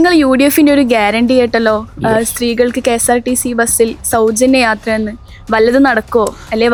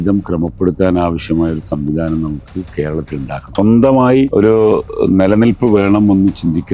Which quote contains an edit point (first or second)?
second